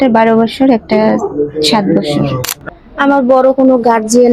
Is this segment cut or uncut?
cut